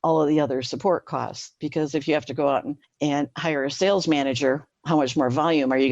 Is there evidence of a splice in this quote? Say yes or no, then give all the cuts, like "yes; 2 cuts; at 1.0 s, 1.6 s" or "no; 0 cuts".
yes; 2 cuts; at 2.8 s, 4.7 s